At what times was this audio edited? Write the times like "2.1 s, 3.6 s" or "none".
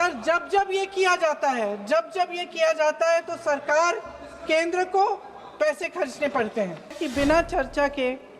7.0 s